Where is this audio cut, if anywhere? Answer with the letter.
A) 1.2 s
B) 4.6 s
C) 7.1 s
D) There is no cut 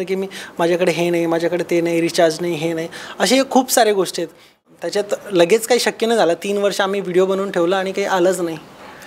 B